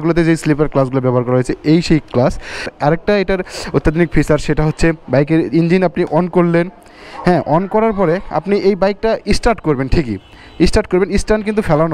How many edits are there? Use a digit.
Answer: 1